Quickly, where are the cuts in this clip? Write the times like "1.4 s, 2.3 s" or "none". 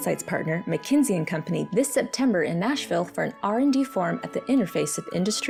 none